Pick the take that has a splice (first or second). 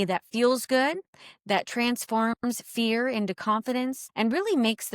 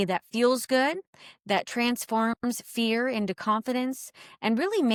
first